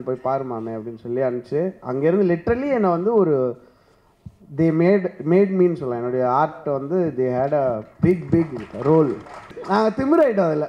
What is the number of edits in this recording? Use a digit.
1